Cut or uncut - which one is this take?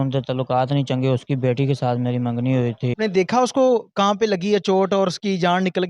cut